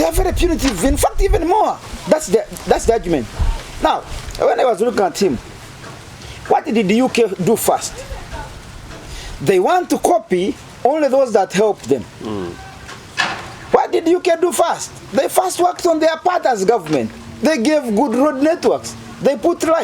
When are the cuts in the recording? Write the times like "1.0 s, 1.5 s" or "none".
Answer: none